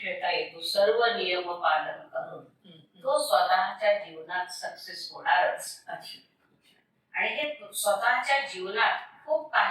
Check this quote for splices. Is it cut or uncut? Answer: uncut